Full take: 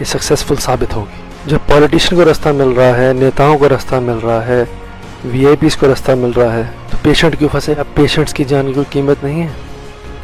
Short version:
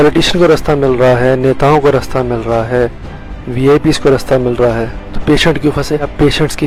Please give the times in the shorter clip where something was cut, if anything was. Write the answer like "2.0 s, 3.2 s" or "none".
none